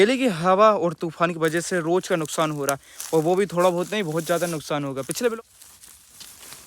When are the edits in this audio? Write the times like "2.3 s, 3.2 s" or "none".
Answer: 5.3 s